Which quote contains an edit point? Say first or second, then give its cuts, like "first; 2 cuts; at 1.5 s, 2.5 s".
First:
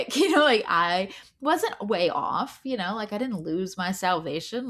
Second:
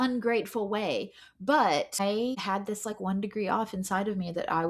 second; 1 cut; at 2.0 s